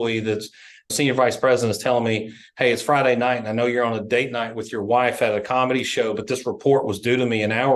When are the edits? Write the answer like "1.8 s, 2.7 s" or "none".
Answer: 0.9 s